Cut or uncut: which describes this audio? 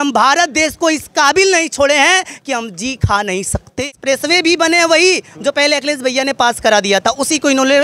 cut